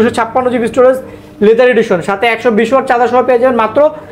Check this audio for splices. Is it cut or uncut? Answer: uncut